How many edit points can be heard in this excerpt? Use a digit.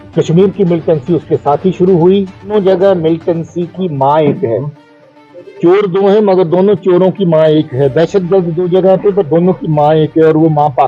1